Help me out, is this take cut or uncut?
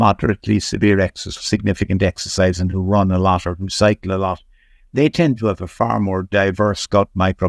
uncut